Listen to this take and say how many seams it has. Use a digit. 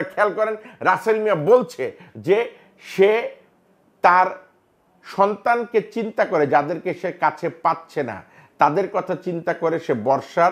0